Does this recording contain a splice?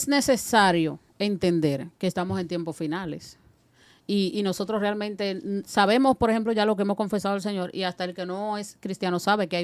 no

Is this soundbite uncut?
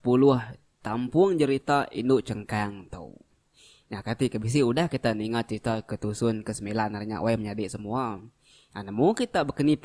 yes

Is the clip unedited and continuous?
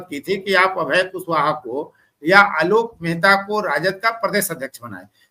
yes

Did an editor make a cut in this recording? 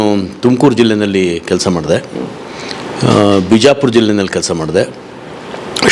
no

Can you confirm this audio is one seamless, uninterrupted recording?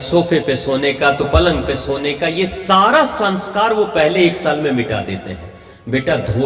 yes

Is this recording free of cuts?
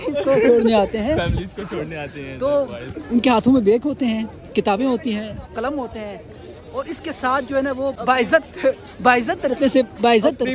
no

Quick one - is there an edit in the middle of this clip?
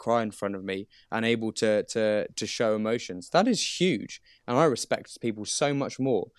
no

